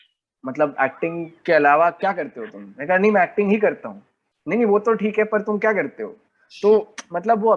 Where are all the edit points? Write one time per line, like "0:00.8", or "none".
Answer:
none

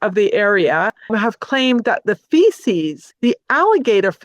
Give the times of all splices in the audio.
0:01.1
0:03.0

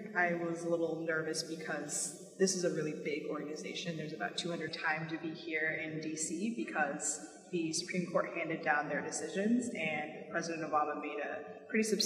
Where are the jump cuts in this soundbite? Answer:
none

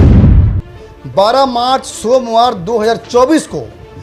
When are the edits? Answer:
0:01.0

